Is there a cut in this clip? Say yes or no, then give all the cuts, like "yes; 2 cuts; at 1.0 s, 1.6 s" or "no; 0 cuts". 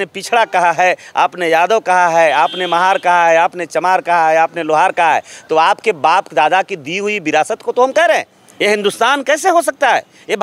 yes; 1 cut; at 8.4 s